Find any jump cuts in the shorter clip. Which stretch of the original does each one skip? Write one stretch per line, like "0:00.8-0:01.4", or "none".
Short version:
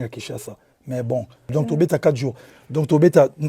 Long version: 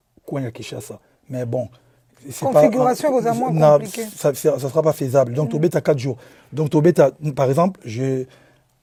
0:01.9-0:05.3